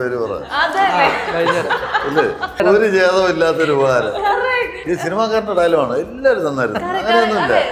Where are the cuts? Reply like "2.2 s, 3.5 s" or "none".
2.6 s